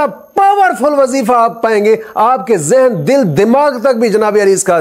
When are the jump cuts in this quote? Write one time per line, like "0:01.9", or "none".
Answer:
none